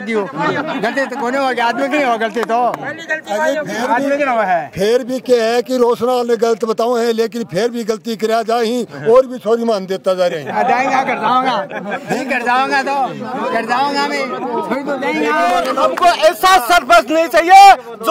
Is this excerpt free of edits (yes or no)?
no